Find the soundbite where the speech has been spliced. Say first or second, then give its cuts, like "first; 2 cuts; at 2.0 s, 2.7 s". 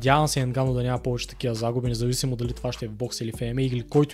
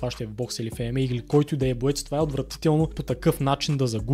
second; 1 cut; at 3.0 s